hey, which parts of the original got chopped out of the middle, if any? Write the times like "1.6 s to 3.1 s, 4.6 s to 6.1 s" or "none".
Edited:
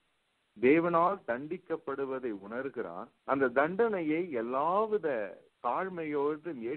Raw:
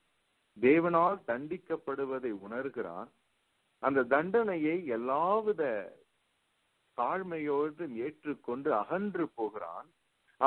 3.1 s to 3.6 s, 6.0 s to 6.8 s